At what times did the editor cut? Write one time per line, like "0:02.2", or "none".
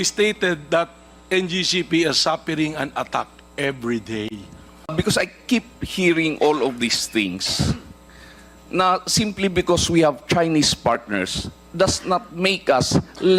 0:04.9